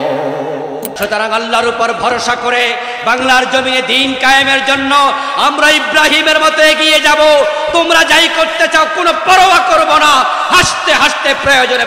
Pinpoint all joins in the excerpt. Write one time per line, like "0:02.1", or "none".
0:00.9